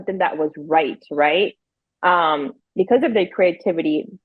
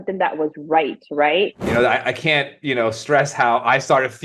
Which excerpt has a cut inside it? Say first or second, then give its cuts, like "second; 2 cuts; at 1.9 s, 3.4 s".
second; 1 cut; at 1.6 s